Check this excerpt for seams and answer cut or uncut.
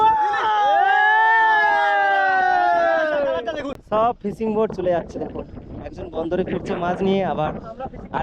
cut